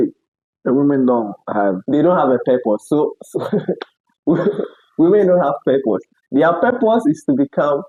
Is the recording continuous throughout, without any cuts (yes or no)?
yes